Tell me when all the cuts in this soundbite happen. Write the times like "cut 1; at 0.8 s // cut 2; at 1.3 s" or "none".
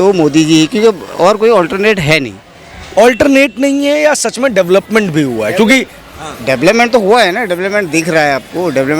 none

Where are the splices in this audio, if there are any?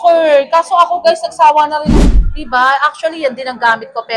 cut 1; at 1.9 s

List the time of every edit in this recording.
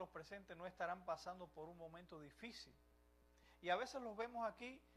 cut 1; at 1.4 s

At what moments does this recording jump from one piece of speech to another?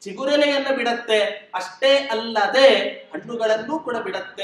none

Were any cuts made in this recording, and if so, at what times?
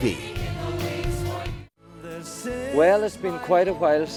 none

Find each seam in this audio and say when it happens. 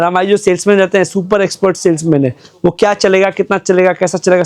none

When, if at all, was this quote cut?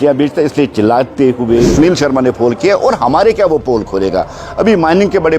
cut 1; at 1.7 s

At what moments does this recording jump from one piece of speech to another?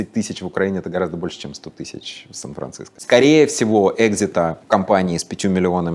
cut 1; at 2.9 s // cut 2; at 4.6 s

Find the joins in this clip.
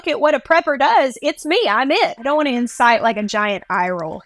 cut 1; at 2.2 s

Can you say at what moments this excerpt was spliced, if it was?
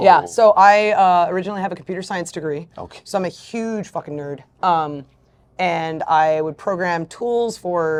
none

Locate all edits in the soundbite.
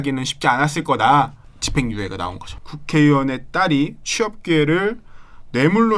cut 1; at 1.4 s // cut 2; at 2.6 s

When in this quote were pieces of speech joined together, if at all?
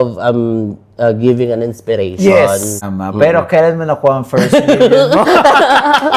cut 1; at 2.8 s

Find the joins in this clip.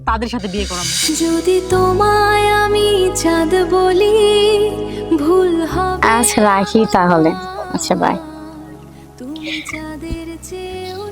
cut 1; at 1.0 s

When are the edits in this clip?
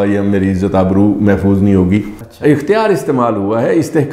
cut 1; at 2.2 s

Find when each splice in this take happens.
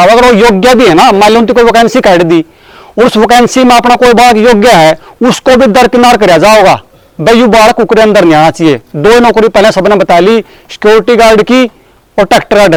none

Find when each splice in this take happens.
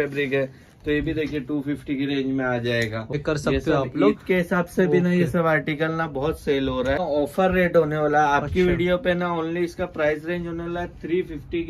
cut 1; at 3.1 s // cut 2; at 7.0 s

